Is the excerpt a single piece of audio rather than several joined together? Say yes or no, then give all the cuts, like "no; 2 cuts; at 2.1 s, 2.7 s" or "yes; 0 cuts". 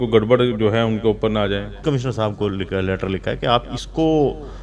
no; 1 cut; at 1.8 s